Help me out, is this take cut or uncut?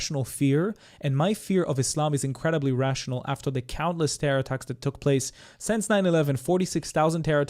uncut